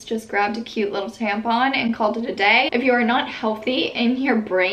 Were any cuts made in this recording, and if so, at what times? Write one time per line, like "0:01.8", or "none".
0:02.7